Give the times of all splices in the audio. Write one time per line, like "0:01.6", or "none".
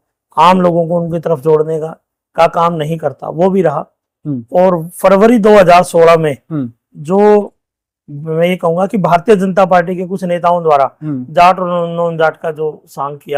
none

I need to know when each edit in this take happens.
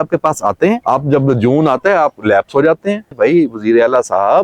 0:00.8
0:03.1

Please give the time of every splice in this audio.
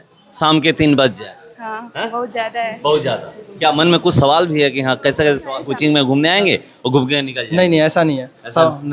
0:05.7

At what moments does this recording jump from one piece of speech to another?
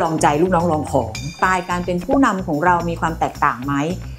0:01.1

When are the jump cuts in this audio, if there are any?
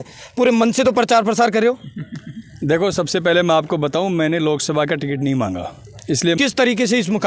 0:06.4

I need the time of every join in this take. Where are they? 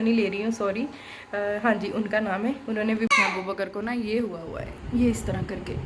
0:03.1

